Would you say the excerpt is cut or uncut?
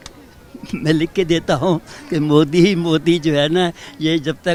uncut